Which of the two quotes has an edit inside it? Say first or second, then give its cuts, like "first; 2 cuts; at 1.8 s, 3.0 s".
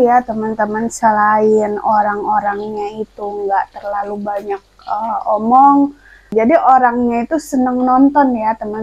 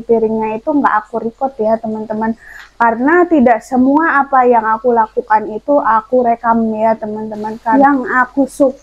second; 1 cut; at 7.7 s